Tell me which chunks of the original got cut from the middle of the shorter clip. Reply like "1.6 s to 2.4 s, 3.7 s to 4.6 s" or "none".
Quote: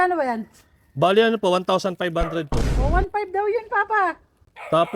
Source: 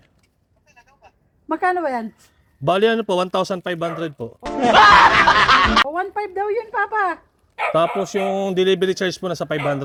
4.5 s to 5.9 s